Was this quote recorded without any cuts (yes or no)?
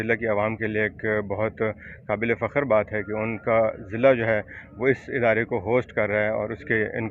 yes